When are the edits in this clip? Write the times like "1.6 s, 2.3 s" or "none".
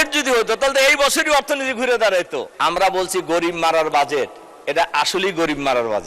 2.4 s